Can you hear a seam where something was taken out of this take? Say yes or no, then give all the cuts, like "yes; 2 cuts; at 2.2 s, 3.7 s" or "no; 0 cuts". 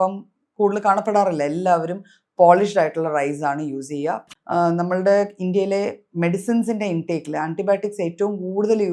yes; 1 cut; at 4.3 s